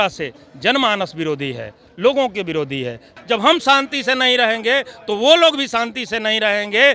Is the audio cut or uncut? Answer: cut